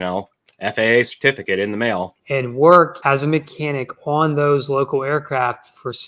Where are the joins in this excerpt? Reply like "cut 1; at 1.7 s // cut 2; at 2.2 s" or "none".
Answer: cut 1; at 2.2 s // cut 2; at 3.0 s